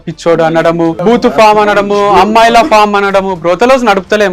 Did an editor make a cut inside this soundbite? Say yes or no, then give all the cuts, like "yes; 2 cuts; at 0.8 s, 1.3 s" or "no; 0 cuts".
yes; 1 cut; at 1.0 s